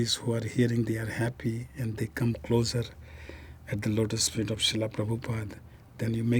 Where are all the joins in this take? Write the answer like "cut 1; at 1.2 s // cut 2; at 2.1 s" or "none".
none